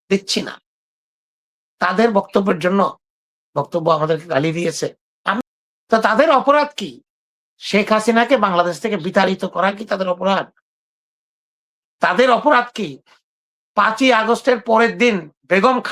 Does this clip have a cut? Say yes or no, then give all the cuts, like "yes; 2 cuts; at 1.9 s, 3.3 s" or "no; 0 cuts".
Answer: yes; 1 cut; at 5.4 s